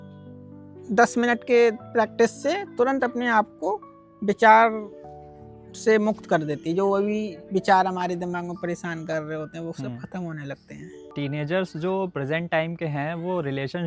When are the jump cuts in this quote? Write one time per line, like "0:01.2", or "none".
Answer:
0:11.0